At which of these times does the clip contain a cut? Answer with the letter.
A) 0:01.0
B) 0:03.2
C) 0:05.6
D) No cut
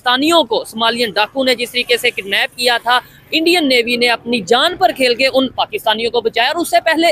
D